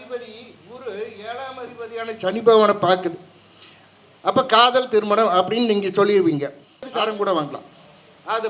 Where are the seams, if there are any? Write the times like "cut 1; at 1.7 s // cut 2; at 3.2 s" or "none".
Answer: cut 1; at 6.9 s

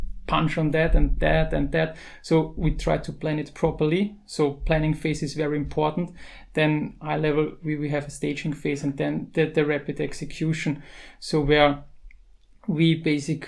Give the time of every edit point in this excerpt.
none

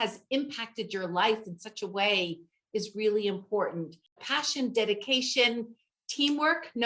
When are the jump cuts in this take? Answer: cut 1; at 4.2 s

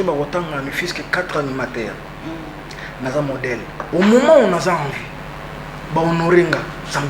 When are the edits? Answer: cut 1; at 3.8 s

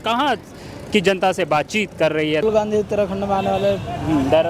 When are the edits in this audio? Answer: cut 1; at 2.4 s

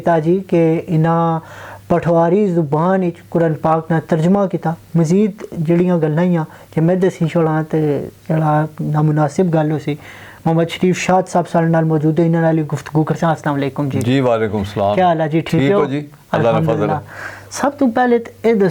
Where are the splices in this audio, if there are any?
none

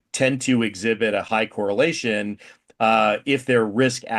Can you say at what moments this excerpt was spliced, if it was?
none

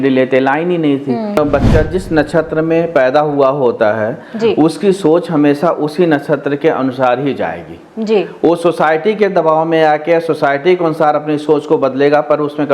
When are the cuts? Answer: cut 1; at 1.4 s

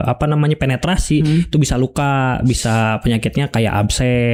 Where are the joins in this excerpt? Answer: none

